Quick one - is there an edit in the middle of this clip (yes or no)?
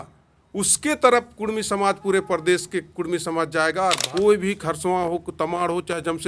yes